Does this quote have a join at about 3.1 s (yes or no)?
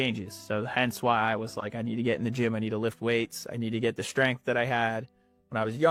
no